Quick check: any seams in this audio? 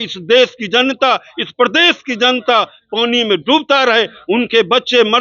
no; 0 cuts

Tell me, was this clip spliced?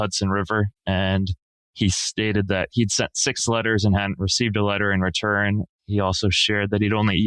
no; 0 cuts

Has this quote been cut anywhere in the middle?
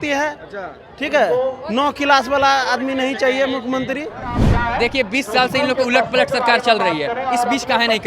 yes; 1 cut; at 4.4 s

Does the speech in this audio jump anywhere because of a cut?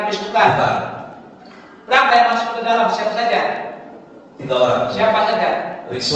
no; 0 cuts

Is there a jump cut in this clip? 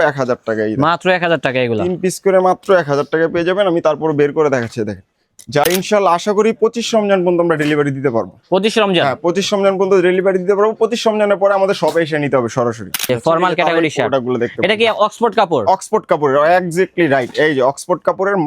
yes; 2 cuts; at 5.6 s, 13.0 s

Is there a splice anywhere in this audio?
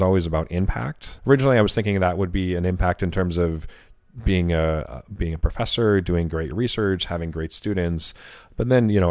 yes; 1 cut; at 1.1 s

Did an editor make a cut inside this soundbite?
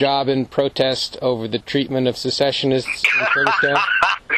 no; 0 cuts

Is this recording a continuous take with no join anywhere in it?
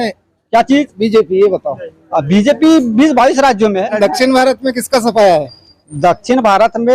no; 1 cut; at 3.9 s

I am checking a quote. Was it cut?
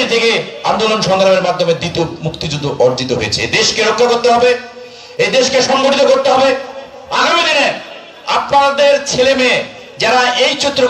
no; 0 cuts

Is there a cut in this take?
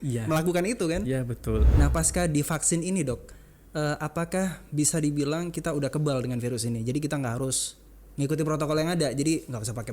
yes; 1 cut; at 1.7 s

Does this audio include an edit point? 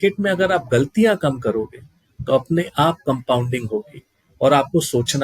no; 0 cuts

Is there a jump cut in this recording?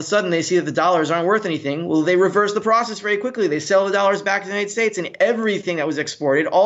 no; 0 cuts

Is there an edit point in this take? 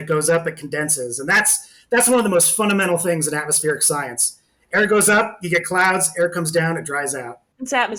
no; 0 cuts

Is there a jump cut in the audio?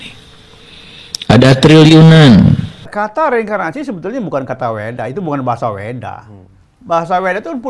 yes; 1 cut; at 2.9 s

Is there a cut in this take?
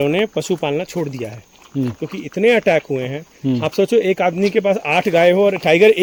no; 0 cuts

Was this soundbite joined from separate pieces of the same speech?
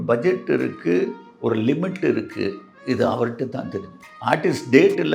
no; 0 cuts

